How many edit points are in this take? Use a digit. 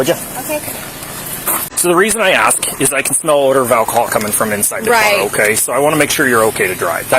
1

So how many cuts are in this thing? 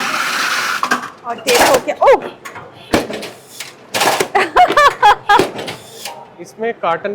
0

